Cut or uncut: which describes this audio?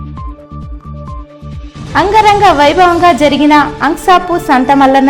cut